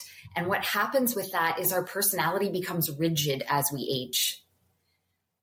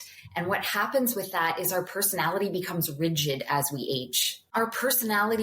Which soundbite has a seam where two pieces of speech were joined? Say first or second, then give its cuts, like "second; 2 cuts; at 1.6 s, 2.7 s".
second; 1 cut; at 4.5 s